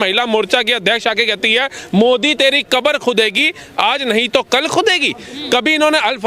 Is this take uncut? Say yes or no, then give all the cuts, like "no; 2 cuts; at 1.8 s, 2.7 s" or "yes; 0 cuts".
yes; 0 cuts